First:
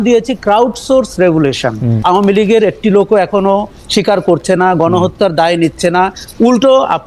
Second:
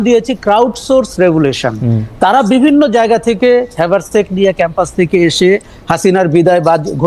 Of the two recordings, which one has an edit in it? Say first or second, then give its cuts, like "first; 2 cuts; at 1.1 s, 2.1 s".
first; 1 cut; at 2.0 s